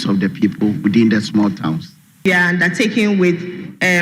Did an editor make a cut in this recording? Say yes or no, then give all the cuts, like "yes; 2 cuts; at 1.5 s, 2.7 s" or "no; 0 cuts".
yes; 1 cut; at 2.2 s